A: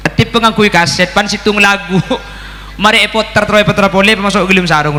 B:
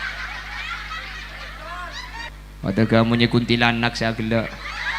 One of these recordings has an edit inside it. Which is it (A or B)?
B